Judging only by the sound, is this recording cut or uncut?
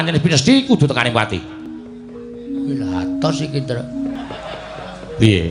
cut